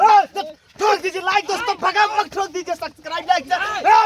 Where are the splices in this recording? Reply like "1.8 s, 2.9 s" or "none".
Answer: none